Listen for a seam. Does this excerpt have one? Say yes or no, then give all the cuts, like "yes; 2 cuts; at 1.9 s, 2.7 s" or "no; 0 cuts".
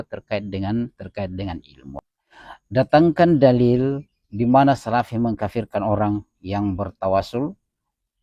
yes; 1 cut; at 2.0 s